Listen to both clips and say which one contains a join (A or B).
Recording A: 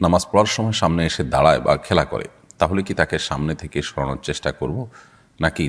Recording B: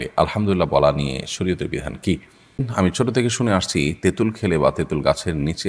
B